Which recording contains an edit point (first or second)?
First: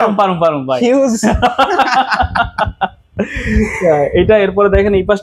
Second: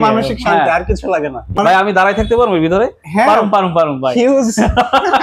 second